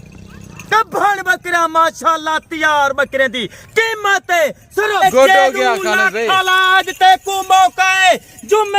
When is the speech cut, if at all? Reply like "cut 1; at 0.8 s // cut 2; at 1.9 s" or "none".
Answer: cut 1; at 5.0 s